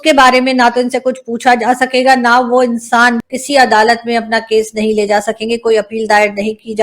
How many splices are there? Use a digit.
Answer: 1